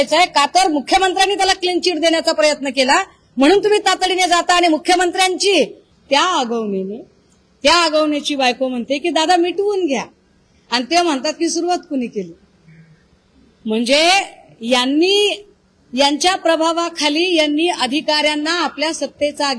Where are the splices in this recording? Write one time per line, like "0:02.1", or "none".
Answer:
0:05.9